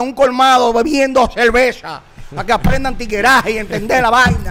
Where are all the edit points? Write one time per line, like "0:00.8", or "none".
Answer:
none